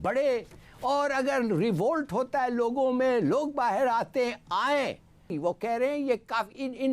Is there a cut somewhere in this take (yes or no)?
yes